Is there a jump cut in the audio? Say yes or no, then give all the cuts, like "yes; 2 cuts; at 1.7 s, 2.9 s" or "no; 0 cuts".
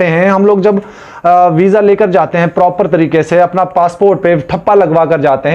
no; 0 cuts